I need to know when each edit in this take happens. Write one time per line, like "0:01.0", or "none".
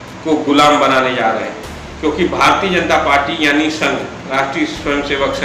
none